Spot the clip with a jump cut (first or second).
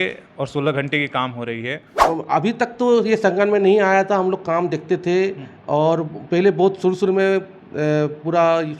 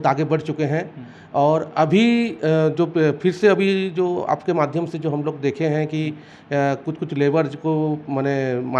first